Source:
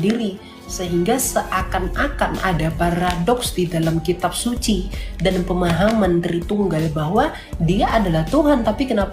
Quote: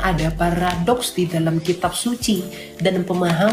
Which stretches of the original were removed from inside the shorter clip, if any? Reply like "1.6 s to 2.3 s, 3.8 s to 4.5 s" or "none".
none

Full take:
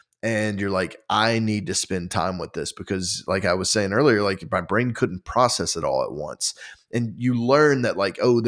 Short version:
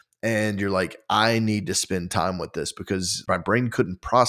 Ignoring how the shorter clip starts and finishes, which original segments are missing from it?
3.2 s to 4.4 s

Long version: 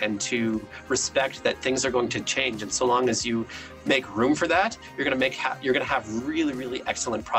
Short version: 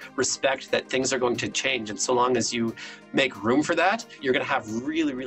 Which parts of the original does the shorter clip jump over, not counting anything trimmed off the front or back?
4.8 s to 5.5 s

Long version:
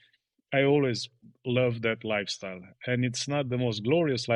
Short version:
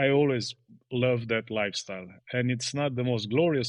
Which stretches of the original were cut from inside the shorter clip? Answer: none

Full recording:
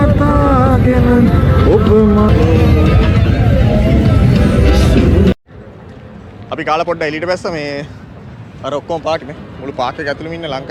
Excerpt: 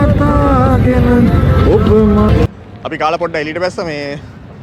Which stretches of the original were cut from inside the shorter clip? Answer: 2.5 s to 6.1 s

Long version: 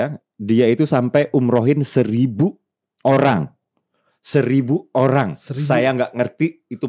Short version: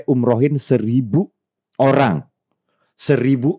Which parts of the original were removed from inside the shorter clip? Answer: none

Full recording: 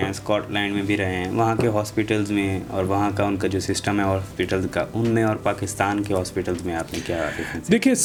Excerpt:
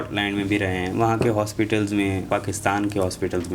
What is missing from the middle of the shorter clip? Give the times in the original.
2.6 s to 5.4 s

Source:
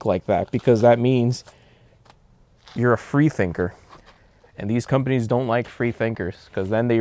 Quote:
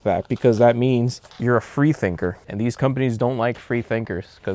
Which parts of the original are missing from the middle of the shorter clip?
1.5 s to 2.6 s, 3.8 s to 4.5 s

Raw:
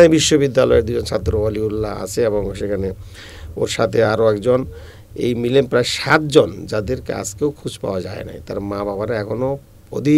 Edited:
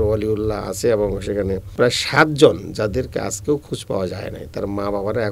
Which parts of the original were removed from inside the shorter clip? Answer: 3.1 s to 5.7 s

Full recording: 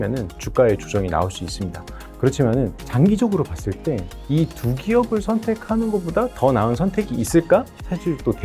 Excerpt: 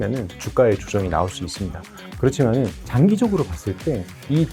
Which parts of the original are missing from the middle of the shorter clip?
none

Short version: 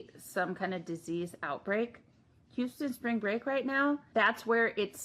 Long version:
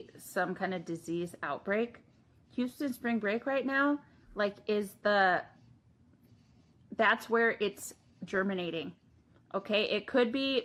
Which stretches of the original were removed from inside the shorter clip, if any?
4.1 s to 6.9 s

